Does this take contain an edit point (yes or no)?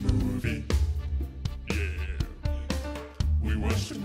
no